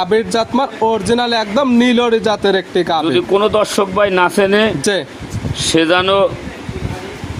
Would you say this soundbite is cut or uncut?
uncut